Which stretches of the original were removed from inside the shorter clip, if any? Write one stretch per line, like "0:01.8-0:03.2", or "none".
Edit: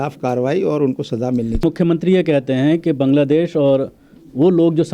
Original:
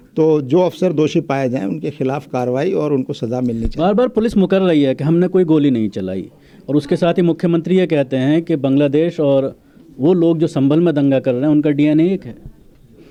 0:03.7-0:07.3